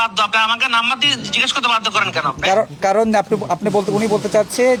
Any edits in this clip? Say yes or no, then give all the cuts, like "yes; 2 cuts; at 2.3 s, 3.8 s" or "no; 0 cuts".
no; 0 cuts